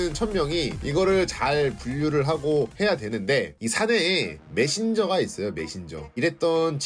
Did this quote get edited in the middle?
no; 0 cuts

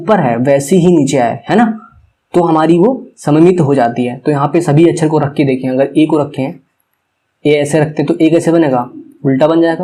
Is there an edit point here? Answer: no; 0 cuts

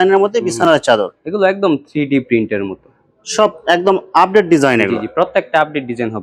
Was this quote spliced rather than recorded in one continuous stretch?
no; 0 cuts

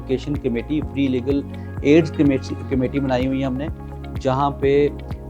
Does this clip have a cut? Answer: no; 0 cuts

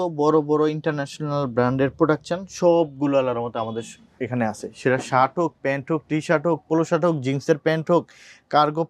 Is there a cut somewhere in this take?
no; 0 cuts

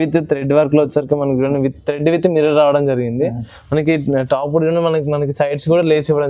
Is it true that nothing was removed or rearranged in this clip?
yes; 0 cuts

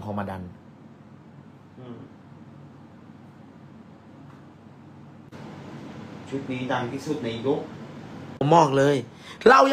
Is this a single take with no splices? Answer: no; 2 cuts; at 5.3 s, 8.4 s

